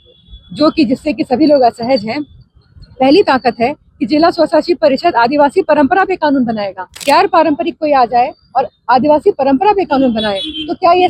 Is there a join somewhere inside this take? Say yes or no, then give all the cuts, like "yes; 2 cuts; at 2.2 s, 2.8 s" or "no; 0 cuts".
yes; 1 cut; at 6.9 s